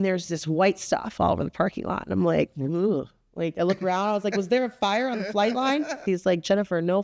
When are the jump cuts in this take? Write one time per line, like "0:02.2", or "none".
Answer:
0:06.0